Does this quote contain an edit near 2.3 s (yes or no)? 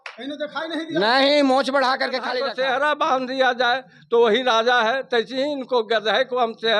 yes